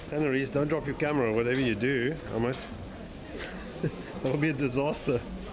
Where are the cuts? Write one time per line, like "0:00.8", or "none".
none